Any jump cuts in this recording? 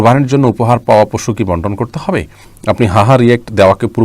yes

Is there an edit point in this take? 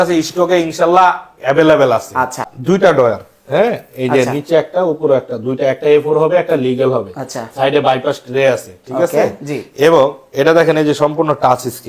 yes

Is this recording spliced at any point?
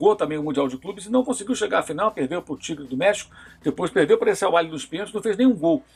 no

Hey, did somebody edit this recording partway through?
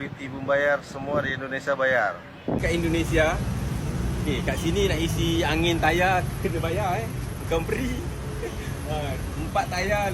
yes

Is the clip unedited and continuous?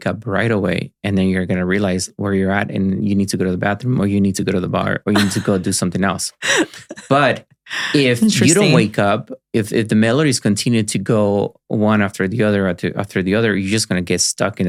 yes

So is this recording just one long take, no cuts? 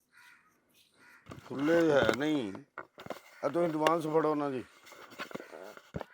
no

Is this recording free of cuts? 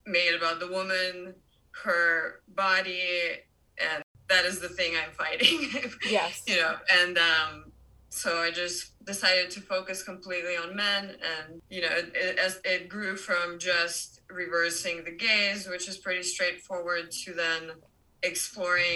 no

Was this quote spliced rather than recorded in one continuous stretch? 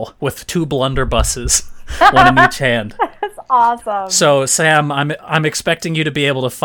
yes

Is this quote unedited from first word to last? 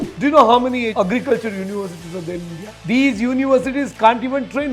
no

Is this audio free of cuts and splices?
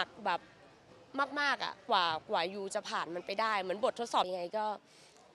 no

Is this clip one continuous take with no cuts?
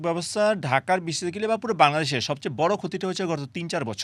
yes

